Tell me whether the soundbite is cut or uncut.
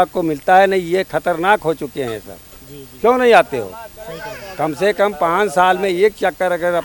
uncut